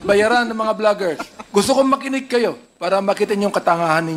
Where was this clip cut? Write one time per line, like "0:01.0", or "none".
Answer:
0:01.3
0:02.7